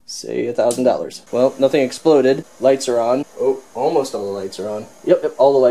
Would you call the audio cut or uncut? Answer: cut